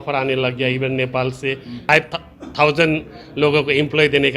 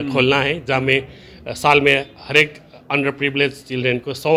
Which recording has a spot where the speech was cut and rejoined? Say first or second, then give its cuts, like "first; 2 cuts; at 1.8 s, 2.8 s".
first; 1 cut; at 1.8 s